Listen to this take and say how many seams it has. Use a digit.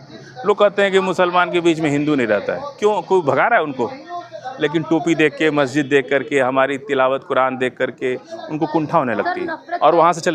0